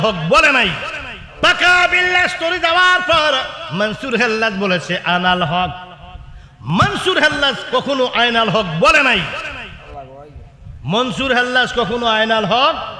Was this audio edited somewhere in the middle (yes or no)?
yes